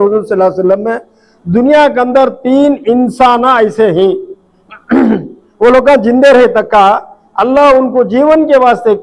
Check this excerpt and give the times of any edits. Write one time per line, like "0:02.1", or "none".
none